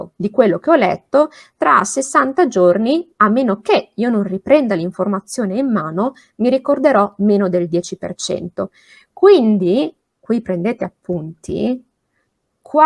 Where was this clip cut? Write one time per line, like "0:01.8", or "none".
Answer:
none